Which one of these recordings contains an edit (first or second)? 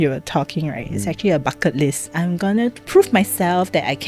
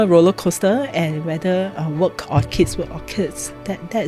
first